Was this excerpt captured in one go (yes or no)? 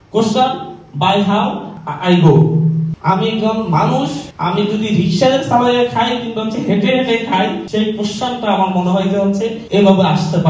no